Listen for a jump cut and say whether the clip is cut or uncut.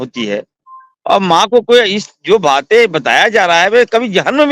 uncut